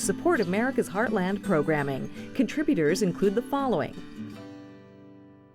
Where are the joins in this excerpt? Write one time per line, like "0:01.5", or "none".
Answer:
0:03.9